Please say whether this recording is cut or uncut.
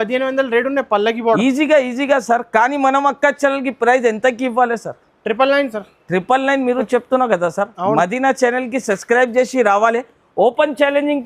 uncut